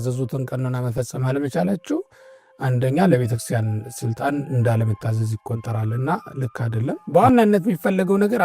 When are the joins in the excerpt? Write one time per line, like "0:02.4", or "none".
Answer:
0:07.0